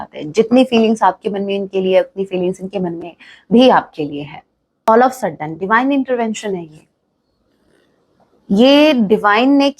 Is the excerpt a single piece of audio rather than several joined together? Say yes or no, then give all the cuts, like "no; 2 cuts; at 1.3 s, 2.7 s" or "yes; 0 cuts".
no; 1 cut; at 4.9 s